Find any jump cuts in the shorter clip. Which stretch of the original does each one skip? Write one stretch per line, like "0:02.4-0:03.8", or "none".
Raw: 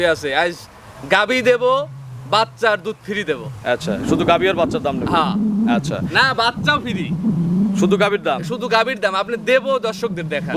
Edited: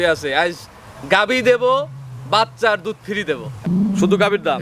0:03.6-0:07.4

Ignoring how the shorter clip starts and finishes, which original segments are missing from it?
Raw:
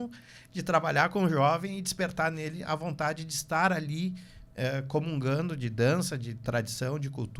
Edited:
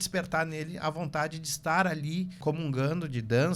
0:04.2-0:04.8

